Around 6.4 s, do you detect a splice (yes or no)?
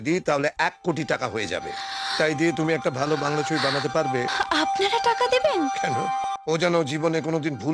yes